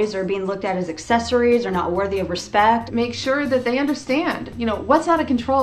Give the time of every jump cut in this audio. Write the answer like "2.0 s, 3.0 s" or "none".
2.9 s